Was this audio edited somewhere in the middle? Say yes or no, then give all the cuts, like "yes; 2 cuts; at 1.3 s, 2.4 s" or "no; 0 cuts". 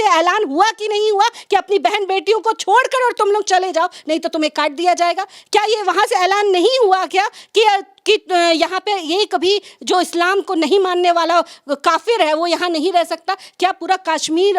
no; 0 cuts